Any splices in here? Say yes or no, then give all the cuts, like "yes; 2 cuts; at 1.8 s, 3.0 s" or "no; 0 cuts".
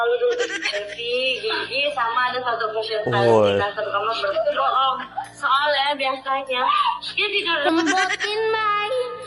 no; 0 cuts